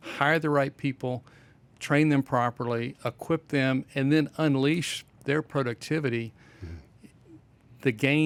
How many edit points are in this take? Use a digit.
0